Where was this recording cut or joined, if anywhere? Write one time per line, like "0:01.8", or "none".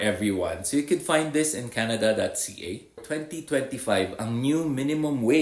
0:03.0